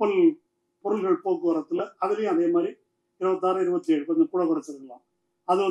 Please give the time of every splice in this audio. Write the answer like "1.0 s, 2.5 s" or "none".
none